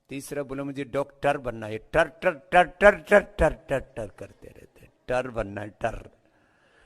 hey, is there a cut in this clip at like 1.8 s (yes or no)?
no